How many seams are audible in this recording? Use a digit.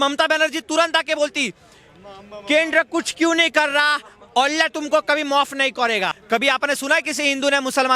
1